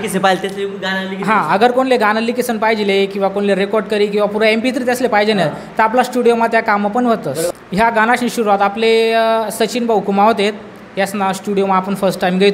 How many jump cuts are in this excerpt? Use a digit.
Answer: 1